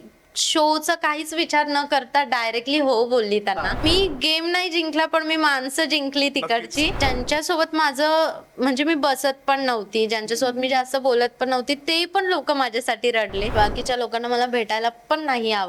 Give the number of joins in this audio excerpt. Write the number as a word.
three